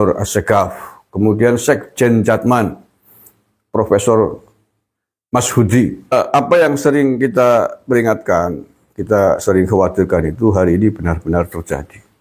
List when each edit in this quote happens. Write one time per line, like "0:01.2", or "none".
0:06.1